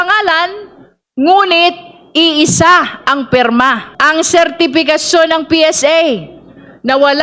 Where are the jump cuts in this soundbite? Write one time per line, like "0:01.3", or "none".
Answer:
0:03.9